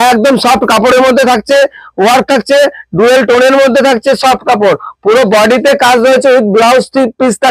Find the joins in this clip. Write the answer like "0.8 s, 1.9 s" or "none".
none